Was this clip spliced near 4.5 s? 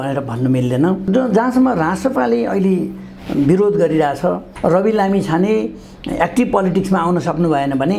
yes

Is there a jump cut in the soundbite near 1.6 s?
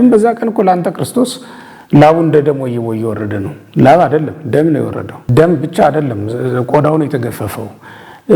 no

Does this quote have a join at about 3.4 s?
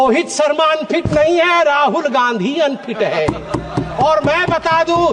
no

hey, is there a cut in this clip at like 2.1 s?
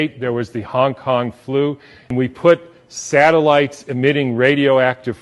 yes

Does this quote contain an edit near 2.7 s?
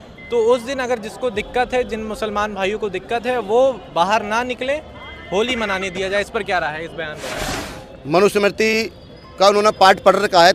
no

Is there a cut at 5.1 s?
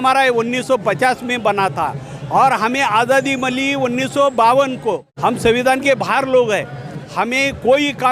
yes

